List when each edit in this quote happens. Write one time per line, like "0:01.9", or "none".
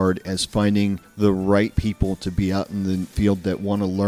0:01.1
0:03.1